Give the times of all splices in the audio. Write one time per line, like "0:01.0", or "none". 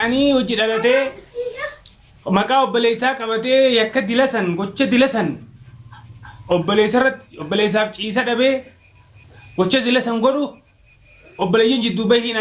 none

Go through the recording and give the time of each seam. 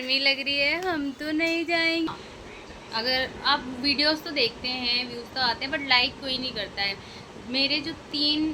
0:02.1

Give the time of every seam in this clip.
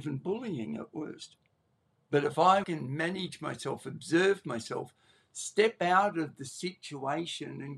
0:02.6

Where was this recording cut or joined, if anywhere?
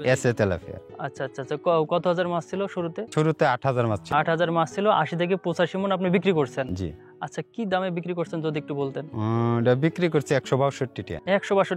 none

